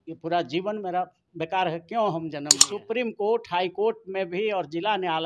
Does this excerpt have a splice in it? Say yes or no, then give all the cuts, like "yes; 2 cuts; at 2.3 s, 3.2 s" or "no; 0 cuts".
yes; 1 cut; at 2.7 s